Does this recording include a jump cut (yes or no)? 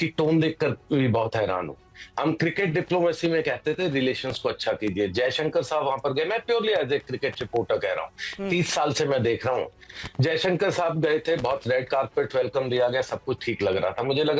no